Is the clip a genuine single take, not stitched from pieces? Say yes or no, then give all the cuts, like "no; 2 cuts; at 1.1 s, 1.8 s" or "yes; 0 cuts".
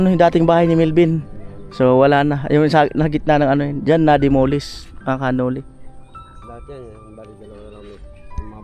yes; 0 cuts